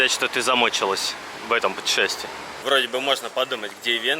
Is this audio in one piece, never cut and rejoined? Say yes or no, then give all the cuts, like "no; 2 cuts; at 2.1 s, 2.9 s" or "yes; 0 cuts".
no; 1 cut; at 2.6 s